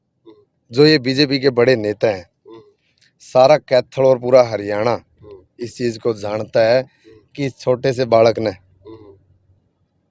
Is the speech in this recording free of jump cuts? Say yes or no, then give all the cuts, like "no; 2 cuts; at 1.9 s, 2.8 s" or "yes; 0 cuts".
yes; 0 cuts